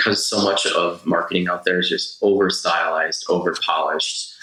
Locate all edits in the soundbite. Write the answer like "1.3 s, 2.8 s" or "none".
none